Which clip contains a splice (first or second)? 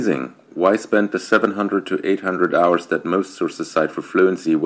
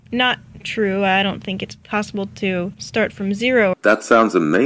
second